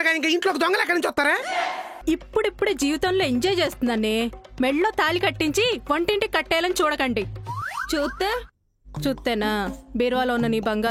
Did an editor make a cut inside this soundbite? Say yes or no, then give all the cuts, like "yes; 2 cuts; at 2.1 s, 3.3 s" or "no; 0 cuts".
yes; 1 cut; at 1.9 s